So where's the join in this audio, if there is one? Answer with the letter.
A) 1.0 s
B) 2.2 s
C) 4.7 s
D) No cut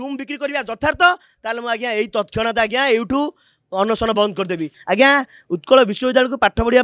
C